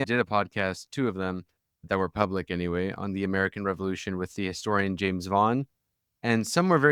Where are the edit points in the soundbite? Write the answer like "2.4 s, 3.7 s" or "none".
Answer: none